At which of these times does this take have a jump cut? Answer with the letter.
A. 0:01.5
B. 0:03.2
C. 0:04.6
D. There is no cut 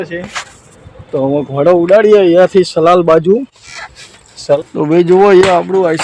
C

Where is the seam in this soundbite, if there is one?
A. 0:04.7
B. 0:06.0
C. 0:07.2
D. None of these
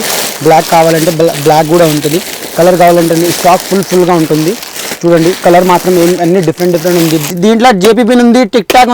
C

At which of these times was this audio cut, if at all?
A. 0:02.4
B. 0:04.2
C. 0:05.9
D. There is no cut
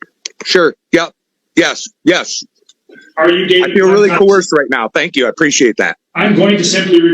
C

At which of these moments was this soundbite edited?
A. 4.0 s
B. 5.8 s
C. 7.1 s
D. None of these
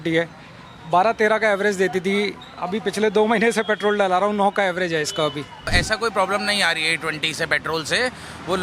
B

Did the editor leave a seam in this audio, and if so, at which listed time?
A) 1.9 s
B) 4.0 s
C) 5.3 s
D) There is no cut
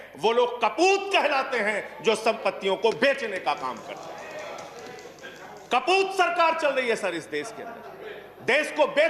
D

